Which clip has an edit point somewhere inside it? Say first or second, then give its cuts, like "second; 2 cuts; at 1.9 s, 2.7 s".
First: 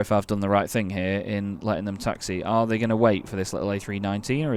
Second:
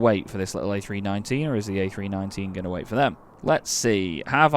second; 1 cut; at 3.3 s